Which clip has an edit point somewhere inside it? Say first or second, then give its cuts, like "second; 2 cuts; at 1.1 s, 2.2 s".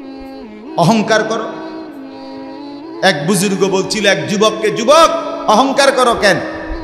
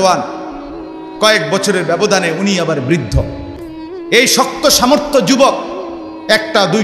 first; 3 cuts; at 0.8 s, 1.4 s, 3.0 s